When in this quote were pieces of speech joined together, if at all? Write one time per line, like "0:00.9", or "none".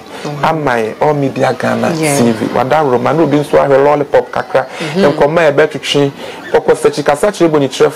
none

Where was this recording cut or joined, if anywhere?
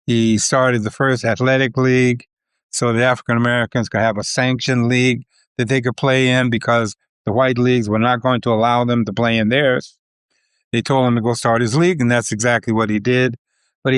none

